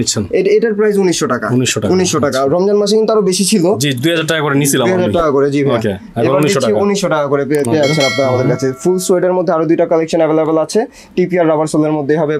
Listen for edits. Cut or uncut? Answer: uncut